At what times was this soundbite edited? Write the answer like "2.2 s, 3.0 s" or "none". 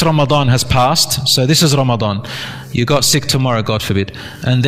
none